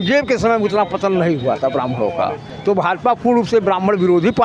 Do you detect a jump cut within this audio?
no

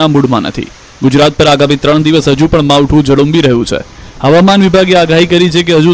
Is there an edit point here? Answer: yes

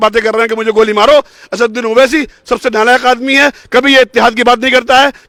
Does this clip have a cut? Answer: no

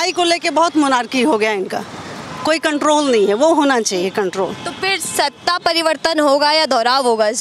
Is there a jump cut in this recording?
no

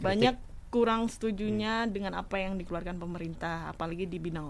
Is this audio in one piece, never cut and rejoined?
yes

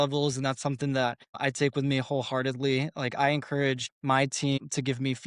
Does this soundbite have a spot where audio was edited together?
yes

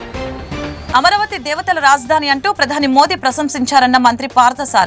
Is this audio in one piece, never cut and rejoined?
yes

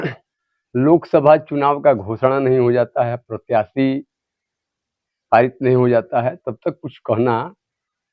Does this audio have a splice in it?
no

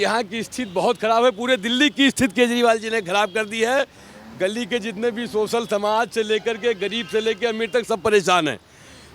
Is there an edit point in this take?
no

